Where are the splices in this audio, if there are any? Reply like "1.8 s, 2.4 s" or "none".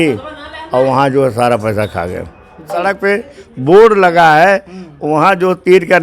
2.8 s